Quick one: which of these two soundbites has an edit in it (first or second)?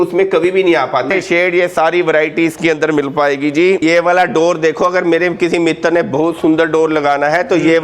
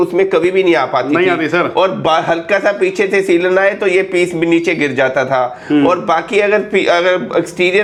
first